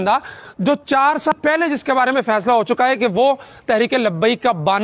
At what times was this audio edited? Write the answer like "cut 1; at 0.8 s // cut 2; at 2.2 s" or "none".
cut 1; at 1.3 s